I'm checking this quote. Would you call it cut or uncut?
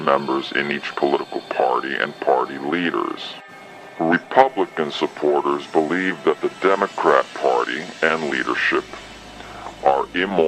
cut